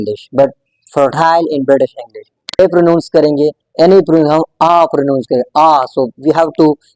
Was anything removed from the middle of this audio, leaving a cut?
yes; 1 cut; at 2.6 s

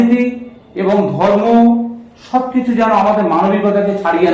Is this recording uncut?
yes; 0 cuts

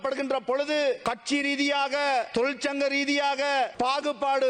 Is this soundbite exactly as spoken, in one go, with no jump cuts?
no; 3 cuts; at 1.0 s, 2.3 s, 3.7 s

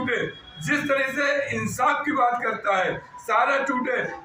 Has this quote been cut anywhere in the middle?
no; 0 cuts

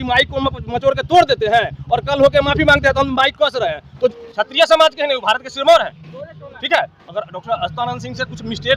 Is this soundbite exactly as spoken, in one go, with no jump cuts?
no; 1 cut; at 4.2 s

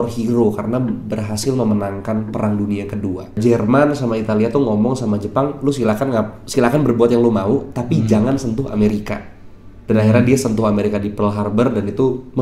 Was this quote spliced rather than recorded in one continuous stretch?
yes; 1 cut; at 3.4 s

